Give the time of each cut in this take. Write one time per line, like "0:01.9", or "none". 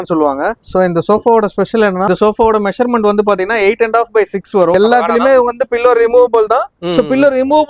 0:02.1
0:04.7